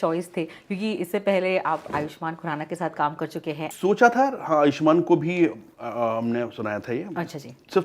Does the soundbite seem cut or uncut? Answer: cut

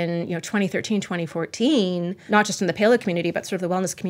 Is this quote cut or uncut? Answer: cut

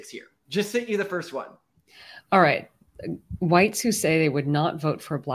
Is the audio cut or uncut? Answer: uncut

